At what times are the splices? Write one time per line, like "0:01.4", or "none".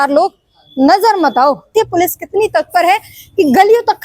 0:01.7